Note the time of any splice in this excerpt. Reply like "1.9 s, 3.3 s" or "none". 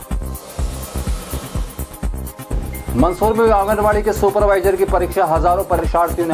1.9 s